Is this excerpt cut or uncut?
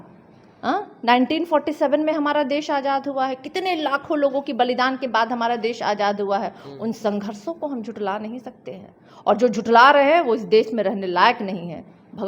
uncut